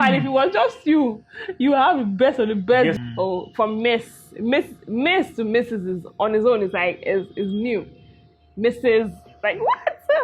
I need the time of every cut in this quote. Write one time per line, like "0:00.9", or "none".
0:03.0

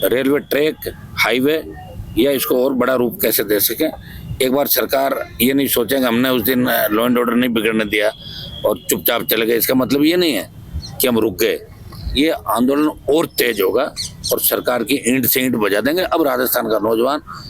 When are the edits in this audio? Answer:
none

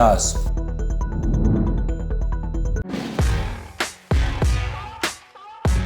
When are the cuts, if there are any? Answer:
0:02.8

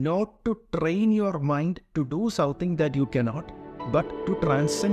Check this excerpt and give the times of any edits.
none

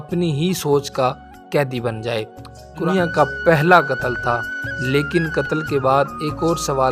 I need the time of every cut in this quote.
0:02.8

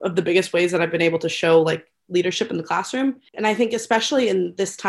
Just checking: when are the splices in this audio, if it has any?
0:03.3

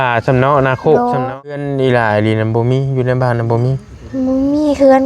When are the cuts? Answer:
0:01.7

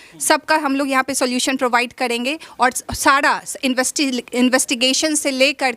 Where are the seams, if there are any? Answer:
none

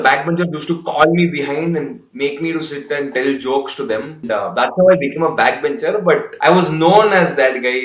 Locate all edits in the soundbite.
0:04.2
0:06.3

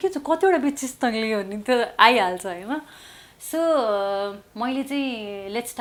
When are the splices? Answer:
none

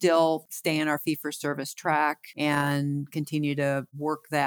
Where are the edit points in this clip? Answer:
0:02.3

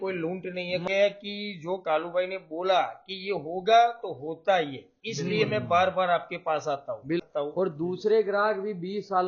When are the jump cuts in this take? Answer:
0:00.9
0:07.3

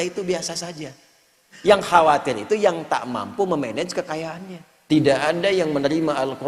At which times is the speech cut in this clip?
0:04.7

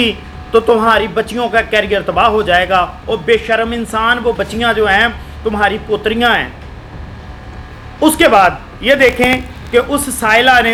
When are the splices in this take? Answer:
none

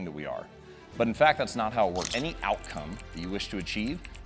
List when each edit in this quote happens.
0:02.1

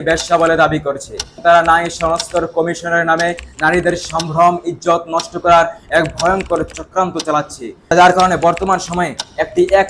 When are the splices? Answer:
0:01.4
0:07.9

